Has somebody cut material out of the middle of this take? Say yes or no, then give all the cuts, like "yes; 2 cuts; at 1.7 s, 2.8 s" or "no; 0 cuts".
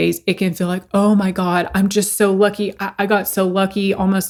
no; 0 cuts